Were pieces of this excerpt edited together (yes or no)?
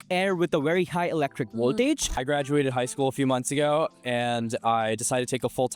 yes